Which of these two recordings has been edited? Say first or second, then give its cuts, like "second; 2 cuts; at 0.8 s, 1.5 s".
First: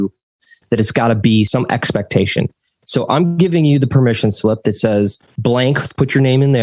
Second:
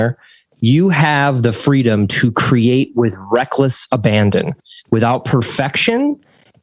first; 2 cuts; at 1.5 s, 5.3 s